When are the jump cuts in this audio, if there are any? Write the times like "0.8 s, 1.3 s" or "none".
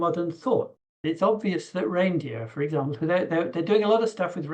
1.0 s

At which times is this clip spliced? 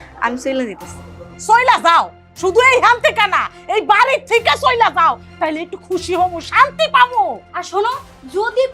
none

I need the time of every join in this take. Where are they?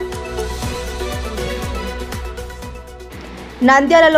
1.3 s, 2.7 s

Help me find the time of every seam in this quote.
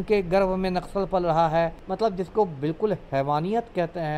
1.8 s

